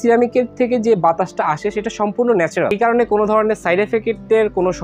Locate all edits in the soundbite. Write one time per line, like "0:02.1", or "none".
0:02.7